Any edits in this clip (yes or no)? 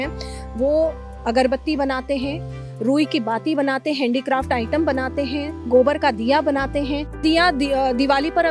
yes